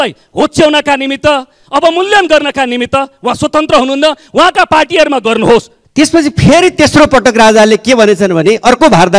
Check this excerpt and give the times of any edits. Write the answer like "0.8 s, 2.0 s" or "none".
5.8 s